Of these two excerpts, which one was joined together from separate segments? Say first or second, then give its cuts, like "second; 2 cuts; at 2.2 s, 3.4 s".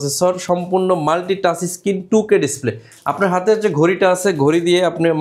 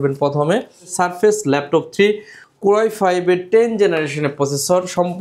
second; 1 cut; at 1.0 s